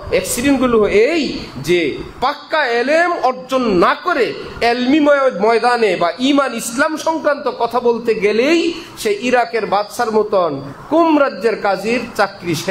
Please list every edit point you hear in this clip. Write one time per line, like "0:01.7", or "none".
none